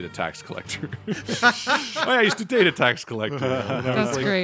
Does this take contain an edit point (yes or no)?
no